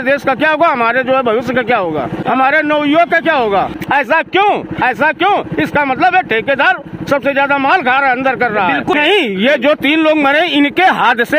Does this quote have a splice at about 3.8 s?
yes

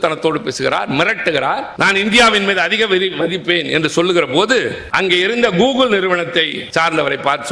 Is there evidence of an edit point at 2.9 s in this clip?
no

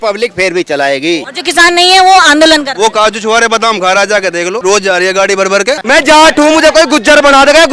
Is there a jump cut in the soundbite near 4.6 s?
yes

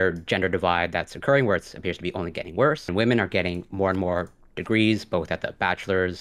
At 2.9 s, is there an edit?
yes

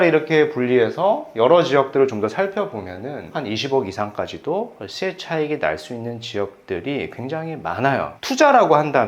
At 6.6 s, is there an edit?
no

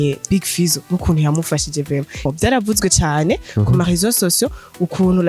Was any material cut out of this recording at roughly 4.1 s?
no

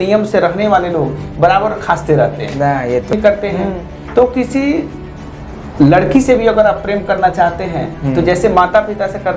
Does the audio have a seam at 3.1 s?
yes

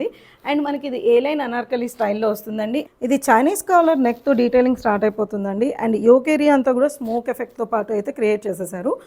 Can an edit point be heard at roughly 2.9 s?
yes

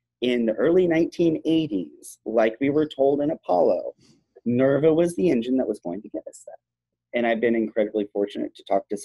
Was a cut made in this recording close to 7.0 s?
yes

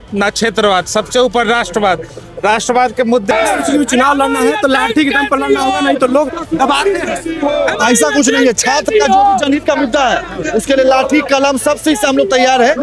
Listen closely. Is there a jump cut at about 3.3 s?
yes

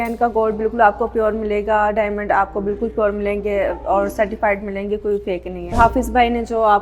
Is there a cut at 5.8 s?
yes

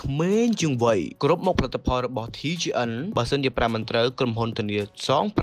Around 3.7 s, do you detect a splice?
no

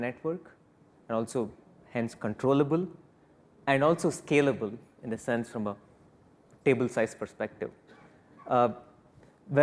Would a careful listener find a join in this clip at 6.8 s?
yes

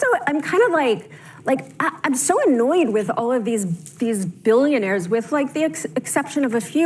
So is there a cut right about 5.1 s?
no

